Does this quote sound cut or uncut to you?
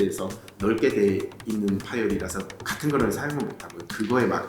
cut